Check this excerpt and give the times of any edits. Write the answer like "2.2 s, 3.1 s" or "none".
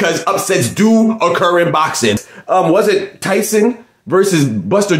2.3 s